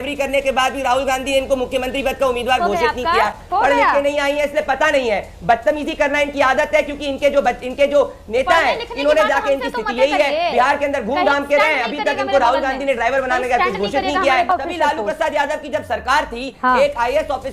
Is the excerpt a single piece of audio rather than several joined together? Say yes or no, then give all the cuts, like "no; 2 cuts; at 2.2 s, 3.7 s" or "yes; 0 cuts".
no; 2 cuts; at 3.4 s, 14.5 s